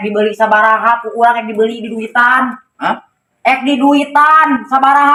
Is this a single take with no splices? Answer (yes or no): yes